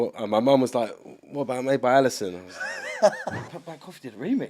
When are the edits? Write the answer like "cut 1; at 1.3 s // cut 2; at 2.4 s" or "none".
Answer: cut 1; at 3.5 s